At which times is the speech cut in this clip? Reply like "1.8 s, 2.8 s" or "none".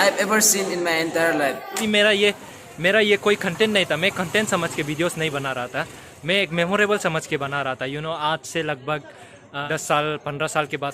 1.8 s, 9.6 s